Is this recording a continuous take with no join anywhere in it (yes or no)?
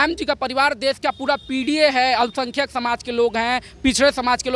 yes